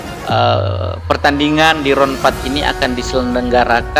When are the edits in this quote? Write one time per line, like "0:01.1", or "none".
none